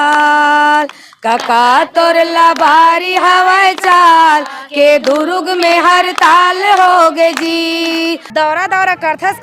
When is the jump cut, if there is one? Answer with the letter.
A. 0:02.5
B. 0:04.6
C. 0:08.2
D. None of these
C